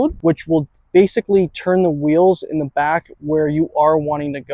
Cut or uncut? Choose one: uncut